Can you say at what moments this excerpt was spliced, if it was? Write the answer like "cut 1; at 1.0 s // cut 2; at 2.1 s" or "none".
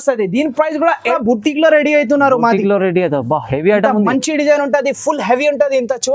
cut 1; at 1.1 s